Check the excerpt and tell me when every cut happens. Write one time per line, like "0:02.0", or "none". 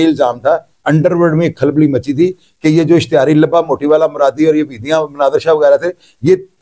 none